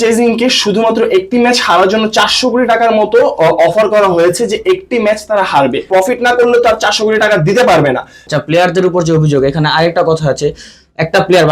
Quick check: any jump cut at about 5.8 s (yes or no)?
yes